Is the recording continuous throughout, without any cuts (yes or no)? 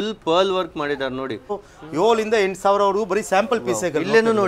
no